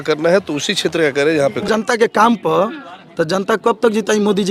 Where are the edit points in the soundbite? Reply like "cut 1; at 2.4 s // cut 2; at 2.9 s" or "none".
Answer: cut 1; at 1.7 s